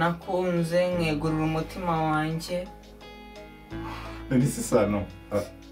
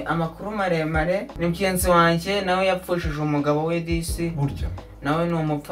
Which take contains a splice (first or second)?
second